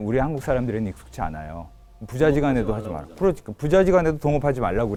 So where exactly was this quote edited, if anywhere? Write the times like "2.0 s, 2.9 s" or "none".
none